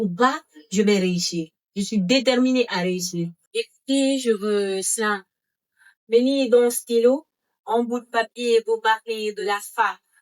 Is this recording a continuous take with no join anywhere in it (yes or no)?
no